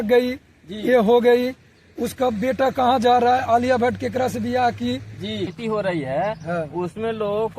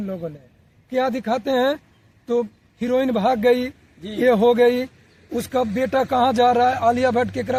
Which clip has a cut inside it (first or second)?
first